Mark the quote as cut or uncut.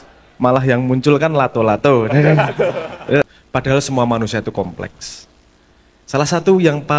cut